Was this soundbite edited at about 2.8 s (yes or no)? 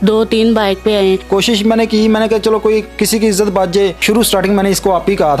no